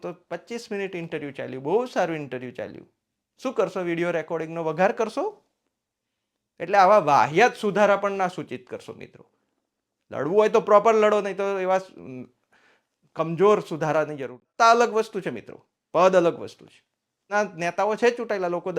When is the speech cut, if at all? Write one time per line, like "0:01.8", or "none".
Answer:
0:14.4
0:17.3

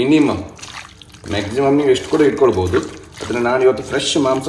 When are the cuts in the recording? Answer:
none

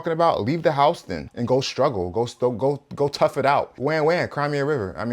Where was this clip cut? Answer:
0:03.7

